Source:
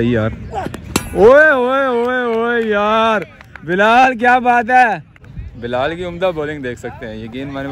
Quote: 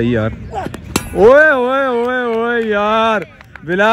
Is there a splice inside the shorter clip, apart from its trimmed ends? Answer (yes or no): no